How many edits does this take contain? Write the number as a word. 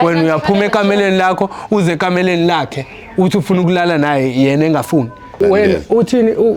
one